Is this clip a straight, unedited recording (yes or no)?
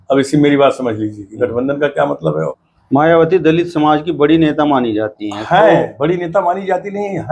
no